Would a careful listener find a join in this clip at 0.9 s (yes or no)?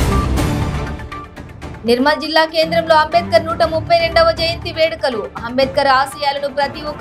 yes